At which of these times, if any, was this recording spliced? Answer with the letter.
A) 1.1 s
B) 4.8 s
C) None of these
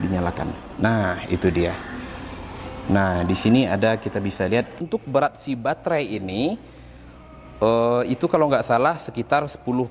B